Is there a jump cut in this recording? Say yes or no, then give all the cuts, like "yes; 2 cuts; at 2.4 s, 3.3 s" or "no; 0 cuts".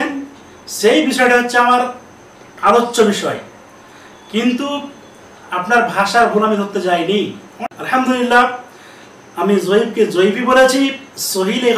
yes; 1 cut; at 7.6 s